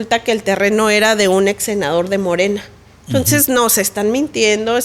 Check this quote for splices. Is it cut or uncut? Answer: uncut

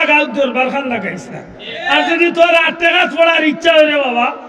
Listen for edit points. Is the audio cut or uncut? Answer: uncut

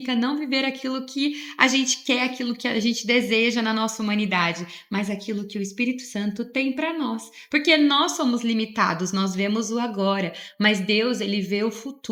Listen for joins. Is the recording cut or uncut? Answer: uncut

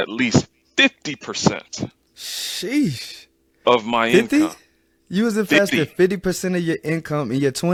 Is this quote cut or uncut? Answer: uncut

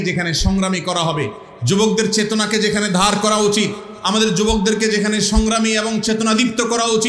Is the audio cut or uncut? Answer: uncut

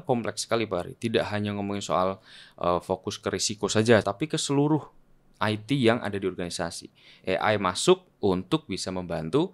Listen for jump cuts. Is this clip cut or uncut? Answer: cut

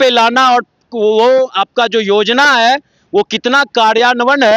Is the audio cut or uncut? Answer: uncut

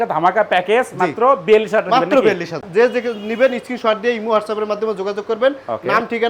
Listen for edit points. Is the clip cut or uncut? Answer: cut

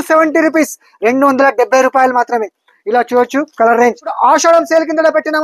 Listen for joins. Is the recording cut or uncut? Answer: cut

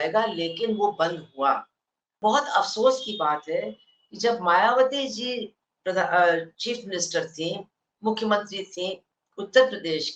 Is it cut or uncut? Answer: cut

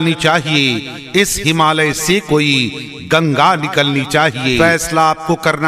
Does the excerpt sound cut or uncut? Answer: cut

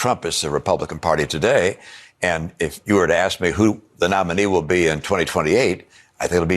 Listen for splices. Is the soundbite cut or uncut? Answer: uncut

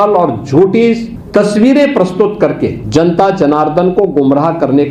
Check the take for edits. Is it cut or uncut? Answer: cut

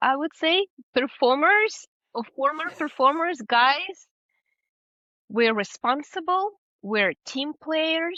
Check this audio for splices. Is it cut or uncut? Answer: uncut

